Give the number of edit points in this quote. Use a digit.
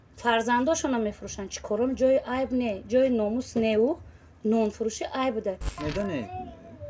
1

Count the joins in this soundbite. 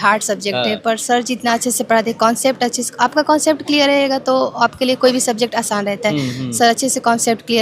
0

